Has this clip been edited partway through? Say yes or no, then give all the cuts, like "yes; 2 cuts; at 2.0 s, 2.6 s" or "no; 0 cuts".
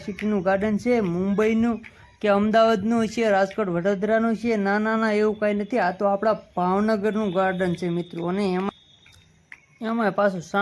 no; 0 cuts